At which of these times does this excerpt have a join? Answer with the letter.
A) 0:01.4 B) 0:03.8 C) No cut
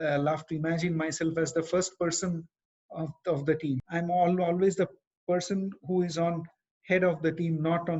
B